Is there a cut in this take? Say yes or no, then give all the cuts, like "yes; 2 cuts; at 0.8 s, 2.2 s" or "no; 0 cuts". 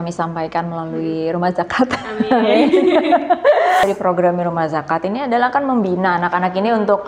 yes; 1 cut; at 3.8 s